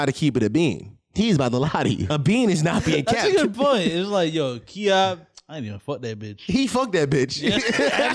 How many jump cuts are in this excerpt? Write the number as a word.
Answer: one